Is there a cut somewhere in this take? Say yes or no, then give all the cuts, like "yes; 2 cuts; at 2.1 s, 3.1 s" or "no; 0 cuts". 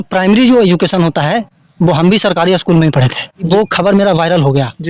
yes; 1 cut; at 3.5 s